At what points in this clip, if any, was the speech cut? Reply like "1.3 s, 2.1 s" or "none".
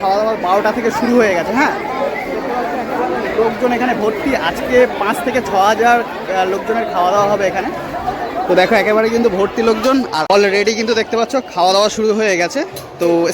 10.3 s